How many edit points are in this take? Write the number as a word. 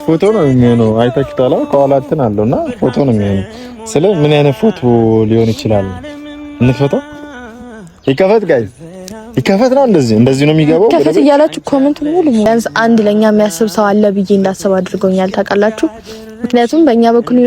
one